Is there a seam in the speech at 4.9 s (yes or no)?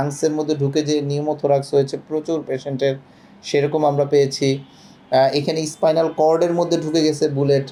no